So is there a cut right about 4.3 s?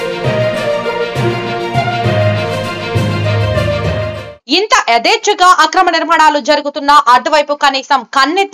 yes; 1 cut; at 4.3 s

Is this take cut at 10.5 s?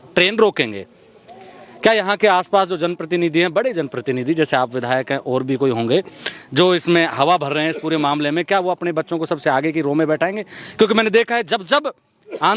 no; 0 cuts

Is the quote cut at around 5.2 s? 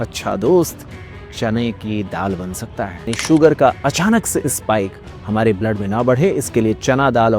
no; 1 cut; at 3.1 s

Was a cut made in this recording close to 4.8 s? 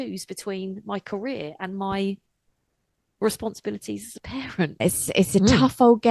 yes; 1 cut; at 4.8 s

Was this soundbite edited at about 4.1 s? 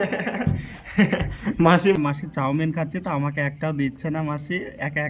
no; 1 cut; at 2.0 s

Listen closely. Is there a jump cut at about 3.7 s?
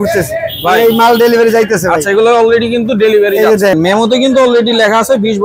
yes; 1 cut; at 3.7 s

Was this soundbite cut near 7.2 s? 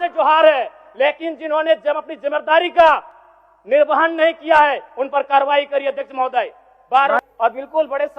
yes; 1 cut; at 7.2 s

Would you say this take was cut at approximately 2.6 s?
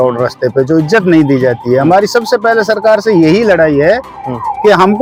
no; 0 cuts

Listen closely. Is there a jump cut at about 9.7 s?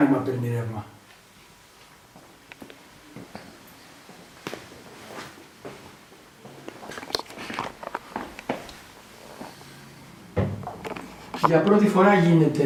no; 0 cuts

